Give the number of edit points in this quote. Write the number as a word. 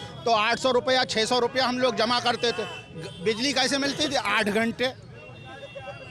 zero